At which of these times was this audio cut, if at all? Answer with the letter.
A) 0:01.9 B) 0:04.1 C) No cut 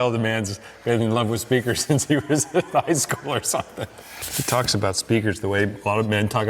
B